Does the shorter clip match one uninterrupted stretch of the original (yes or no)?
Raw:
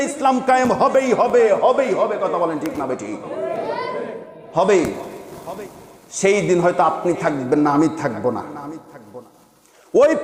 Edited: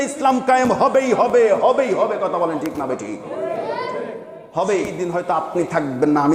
no